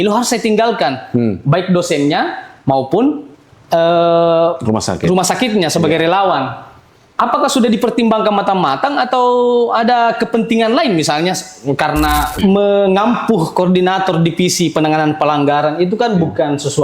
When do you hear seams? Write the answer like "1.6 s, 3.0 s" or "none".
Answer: 12.3 s